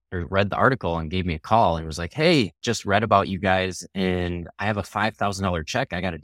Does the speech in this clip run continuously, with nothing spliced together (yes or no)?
no